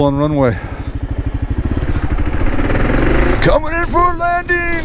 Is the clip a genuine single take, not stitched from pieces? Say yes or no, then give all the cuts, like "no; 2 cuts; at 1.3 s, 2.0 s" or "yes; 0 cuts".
yes; 0 cuts